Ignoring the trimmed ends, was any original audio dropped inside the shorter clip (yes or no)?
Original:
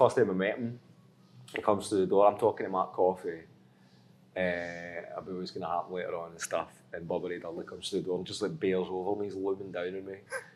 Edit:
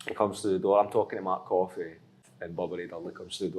yes